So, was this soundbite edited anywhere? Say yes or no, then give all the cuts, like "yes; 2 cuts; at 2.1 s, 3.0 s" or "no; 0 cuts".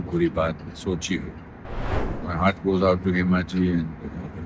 yes; 1 cut; at 1.9 s